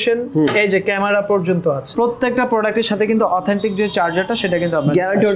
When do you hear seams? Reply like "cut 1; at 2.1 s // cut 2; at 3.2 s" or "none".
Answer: cut 1; at 1.8 s